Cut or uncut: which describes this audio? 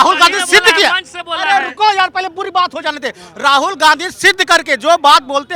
uncut